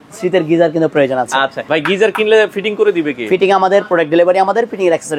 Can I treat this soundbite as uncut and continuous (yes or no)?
no